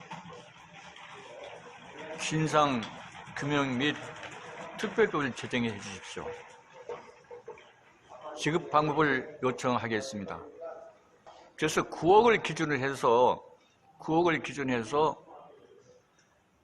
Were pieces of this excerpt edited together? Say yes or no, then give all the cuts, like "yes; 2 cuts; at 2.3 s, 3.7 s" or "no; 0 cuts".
yes; 1 cut; at 11.4 s